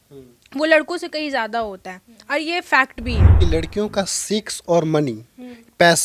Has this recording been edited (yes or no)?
yes